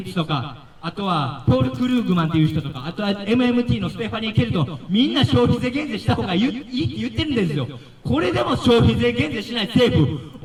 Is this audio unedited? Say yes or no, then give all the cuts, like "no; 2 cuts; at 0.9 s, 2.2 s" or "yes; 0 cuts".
yes; 0 cuts